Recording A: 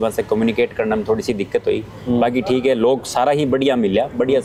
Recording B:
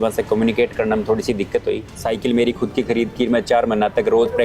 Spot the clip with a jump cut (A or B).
B